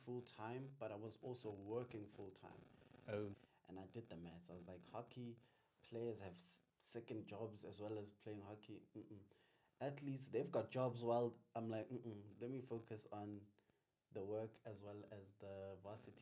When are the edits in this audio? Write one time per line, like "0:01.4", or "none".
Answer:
0:03.5